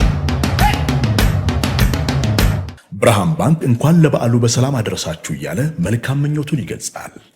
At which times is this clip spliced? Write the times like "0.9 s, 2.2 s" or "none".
2.7 s